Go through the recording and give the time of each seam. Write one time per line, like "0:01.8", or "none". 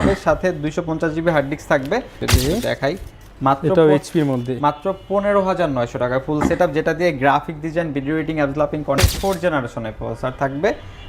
0:02.2
0:09.0